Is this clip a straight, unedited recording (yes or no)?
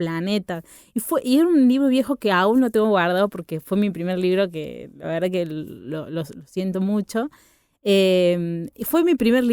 yes